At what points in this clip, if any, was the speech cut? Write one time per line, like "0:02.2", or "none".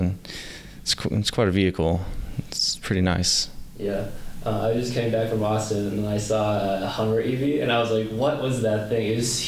none